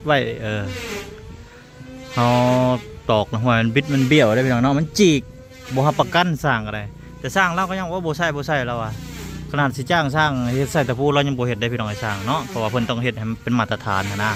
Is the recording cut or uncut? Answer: uncut